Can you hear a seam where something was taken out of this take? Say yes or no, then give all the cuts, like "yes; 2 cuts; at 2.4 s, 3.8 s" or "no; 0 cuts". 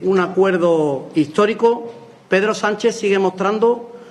no; 0 cuts